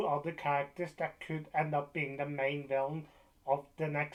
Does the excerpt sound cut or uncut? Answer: uncut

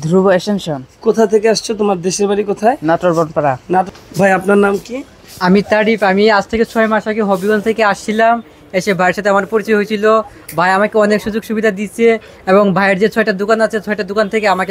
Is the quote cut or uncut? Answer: cut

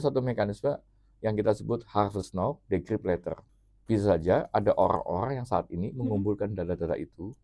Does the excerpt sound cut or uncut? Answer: cut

